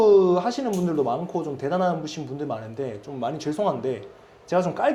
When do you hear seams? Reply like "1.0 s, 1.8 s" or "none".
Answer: none